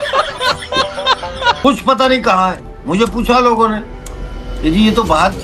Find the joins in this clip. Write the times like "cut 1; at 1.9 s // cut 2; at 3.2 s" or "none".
cut 1; at 1.6 s